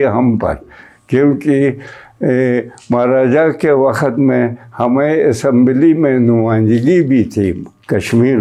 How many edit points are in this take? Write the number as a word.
zero